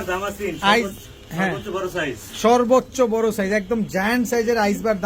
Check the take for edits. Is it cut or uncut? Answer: uncut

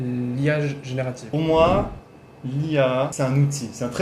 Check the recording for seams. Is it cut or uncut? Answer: cut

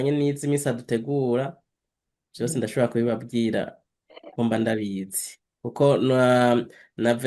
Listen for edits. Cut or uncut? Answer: uncut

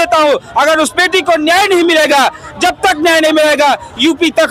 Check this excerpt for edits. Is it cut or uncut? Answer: uncut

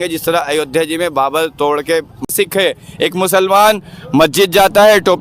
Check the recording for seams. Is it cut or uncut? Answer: cut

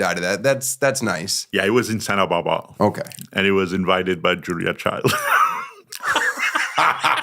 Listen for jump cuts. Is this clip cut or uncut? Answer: cut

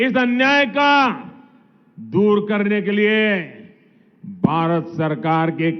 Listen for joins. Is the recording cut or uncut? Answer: uncut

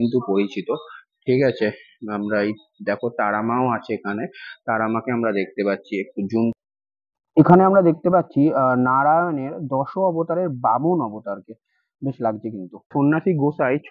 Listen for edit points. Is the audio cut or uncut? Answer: cut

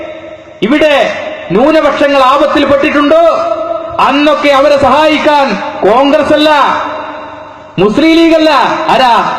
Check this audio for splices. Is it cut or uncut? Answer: cut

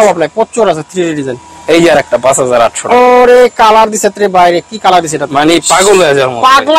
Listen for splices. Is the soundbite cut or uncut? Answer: uncut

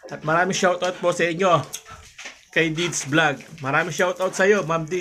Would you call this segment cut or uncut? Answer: uncut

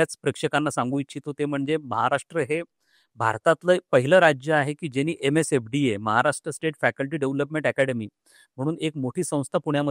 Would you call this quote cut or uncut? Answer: uncut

